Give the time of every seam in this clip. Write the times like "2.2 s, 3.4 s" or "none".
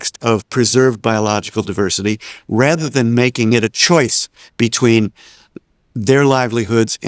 3.5 s